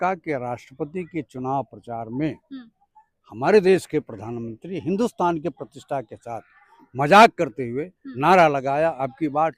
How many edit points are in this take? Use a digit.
0